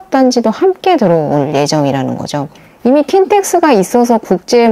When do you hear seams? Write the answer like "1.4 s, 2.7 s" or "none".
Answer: 2.5 s